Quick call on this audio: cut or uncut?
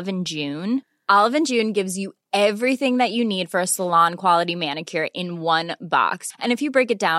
uncut